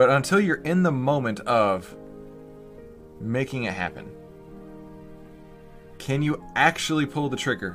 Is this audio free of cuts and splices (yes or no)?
yes